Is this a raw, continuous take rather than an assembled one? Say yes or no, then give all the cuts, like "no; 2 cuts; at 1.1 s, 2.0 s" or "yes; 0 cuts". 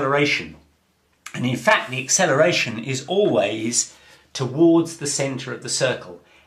yes; 0 cuts